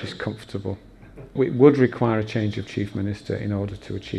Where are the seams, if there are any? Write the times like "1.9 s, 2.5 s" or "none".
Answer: 1.3 s